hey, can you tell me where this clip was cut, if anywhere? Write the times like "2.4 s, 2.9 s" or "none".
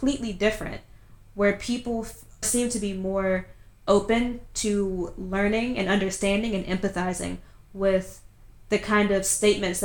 2.5 s